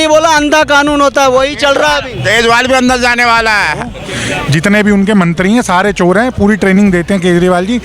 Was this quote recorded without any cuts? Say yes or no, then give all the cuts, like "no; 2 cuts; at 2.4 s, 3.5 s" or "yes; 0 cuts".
no; 1 cut; at 4.0 s